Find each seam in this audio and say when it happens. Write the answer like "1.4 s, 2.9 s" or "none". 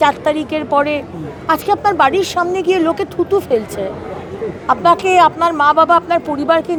none